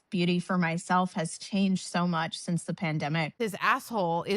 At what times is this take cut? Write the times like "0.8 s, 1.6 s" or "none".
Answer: 3.3 s